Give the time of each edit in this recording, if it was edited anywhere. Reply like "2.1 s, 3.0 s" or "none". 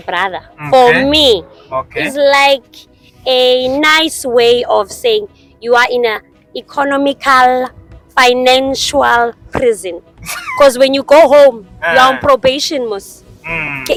none